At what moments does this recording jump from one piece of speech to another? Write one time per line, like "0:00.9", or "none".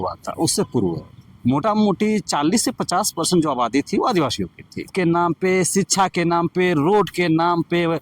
0:04.9